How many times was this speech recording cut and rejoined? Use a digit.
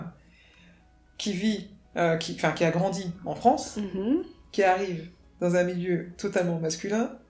0